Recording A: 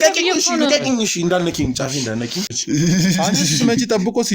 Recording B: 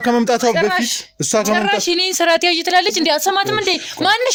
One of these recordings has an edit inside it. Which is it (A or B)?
A